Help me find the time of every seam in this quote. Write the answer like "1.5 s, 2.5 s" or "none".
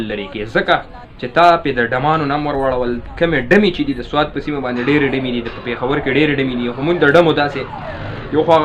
none